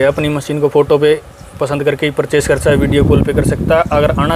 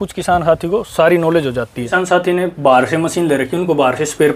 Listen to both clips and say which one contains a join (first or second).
second